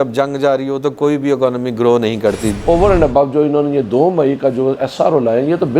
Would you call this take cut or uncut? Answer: cut